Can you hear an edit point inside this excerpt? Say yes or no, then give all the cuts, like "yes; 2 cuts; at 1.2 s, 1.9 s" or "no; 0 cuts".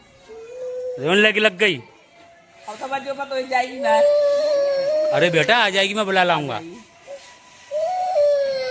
no; 0 cuts